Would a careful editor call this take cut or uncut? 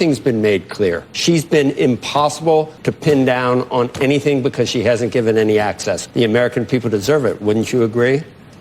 cut